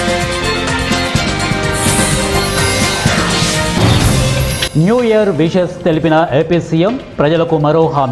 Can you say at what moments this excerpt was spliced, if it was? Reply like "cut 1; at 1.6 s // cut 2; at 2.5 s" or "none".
cut 1; at 4.6 s

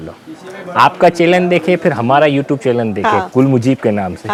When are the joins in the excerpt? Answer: none

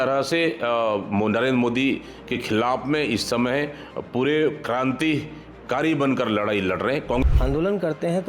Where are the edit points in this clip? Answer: cut 1; at 7.2 s

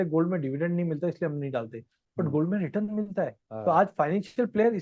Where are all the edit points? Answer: none

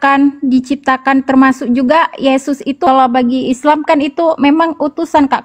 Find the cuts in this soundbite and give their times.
cut 1; at 2.8 s

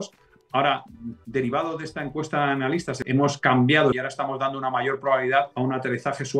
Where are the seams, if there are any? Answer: cut 1; at 2.9 s // cut 2; at 3.9 s // cut 3; at 5.5 s

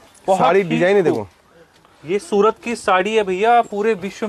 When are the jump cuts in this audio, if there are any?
none

